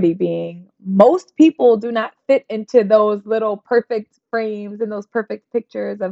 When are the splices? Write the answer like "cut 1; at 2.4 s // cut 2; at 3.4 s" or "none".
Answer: none